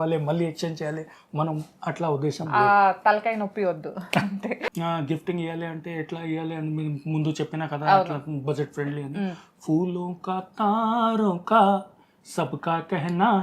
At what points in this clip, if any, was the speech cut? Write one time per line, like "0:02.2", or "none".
0:04.7